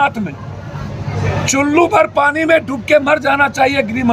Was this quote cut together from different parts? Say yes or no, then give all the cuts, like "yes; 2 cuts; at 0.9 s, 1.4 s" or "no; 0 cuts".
yes; 1 cut; at 1.2 s